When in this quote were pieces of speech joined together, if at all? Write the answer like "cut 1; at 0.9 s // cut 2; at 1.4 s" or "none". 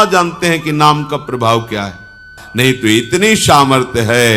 cut 1; at 2.4 s